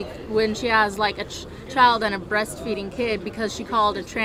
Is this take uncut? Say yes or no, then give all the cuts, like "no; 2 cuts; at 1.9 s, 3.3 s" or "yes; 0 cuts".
yes; 0 cuts